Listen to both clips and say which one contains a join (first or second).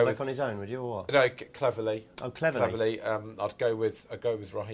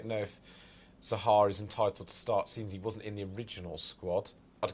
first